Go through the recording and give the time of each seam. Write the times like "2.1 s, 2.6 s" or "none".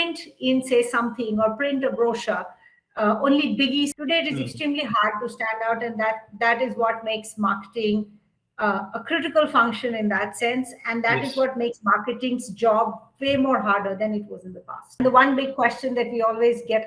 4.0 s, 15.0 s